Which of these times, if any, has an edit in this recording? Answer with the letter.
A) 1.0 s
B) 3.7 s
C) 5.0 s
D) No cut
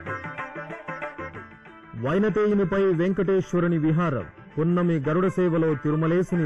A